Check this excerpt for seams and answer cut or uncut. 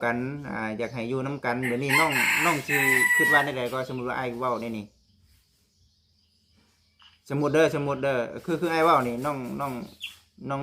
uncut